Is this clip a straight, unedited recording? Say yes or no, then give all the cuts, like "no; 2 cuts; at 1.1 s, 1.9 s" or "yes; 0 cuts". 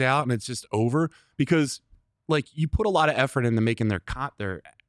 yes; 0 cuts